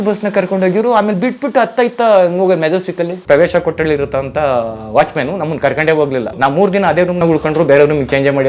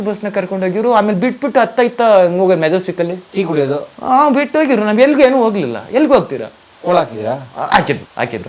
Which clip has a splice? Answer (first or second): first